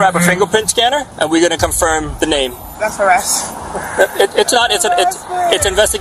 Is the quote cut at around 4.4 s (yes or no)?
no